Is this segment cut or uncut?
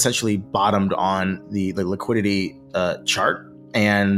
uncut